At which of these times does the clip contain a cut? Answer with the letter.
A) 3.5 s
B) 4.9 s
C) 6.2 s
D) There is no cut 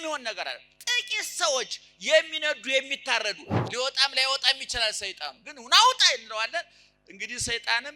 A